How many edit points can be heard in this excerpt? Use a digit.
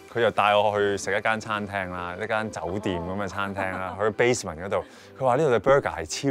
0